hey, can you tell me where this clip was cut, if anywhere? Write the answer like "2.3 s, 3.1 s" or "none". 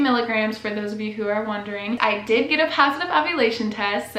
2.0 s